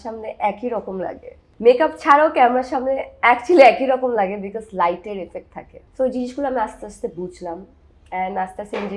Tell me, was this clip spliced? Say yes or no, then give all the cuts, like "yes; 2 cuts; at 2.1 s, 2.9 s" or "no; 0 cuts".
no; 0 cuts